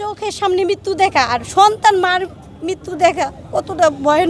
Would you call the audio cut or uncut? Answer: uncut